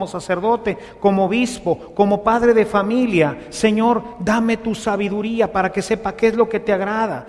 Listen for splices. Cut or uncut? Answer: uncut